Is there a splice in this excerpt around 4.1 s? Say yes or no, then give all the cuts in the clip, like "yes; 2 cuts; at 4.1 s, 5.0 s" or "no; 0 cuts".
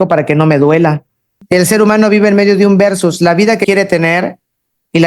no; 1 cut; at 1.3 s